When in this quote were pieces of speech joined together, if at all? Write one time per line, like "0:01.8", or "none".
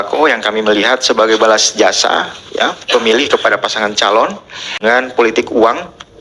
0:04.7